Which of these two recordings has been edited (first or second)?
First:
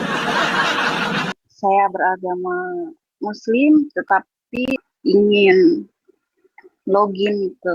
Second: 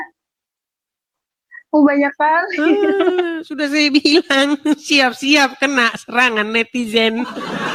first